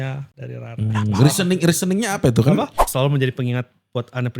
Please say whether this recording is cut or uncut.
cut